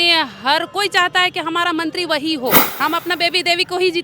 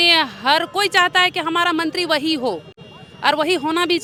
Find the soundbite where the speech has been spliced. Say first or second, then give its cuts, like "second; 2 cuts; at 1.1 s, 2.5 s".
first; 1 cut; at 2.7 s